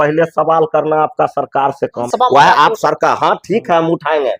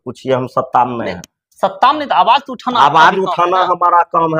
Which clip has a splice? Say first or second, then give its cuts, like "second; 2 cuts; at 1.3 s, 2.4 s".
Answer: first; 1 cut; at 2.1 s